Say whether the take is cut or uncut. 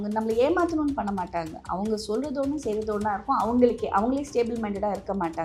uncut